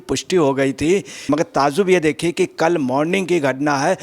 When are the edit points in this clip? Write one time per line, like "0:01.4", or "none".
0:01.2